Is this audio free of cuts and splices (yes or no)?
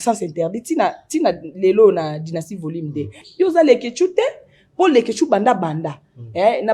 no